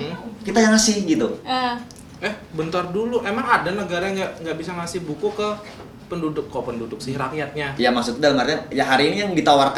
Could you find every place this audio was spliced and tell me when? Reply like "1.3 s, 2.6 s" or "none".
none